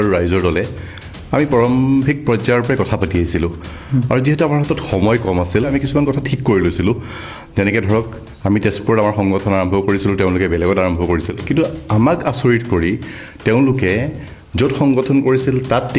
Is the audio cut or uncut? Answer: cut